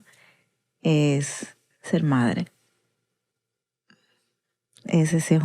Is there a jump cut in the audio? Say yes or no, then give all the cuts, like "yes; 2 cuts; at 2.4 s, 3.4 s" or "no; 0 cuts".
no; 0 cuts